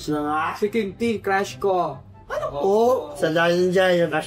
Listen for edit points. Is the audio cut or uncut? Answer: cut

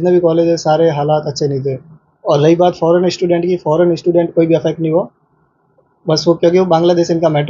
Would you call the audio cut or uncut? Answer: uncut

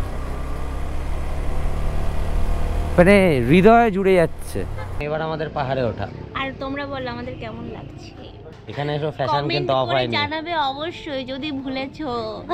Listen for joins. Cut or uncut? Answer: cut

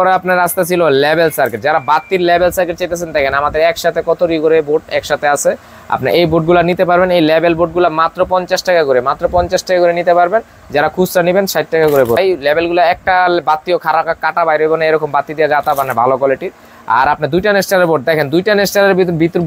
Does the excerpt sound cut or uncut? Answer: uncut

